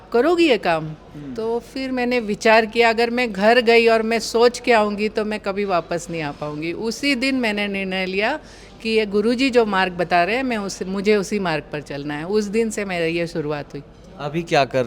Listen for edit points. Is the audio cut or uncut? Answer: uncut